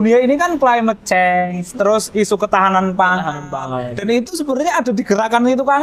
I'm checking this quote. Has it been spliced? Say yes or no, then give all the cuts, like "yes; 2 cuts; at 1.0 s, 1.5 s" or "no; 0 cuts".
no; 0 cuts